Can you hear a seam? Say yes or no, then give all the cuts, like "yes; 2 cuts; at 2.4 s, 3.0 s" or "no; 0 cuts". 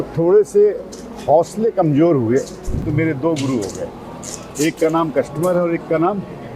yes; 1 cut; at 2.8 s